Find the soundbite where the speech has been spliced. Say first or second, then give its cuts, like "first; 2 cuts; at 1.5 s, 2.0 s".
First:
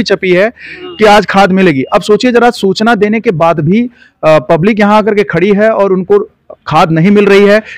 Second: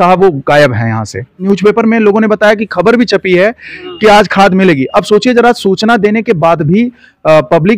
second; 1 cut; at 1.4 s